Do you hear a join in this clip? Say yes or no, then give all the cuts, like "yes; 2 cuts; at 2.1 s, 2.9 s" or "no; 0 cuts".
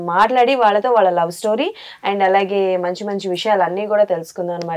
no; 0 cuts